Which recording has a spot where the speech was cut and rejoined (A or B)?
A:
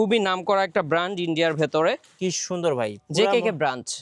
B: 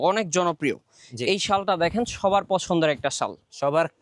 A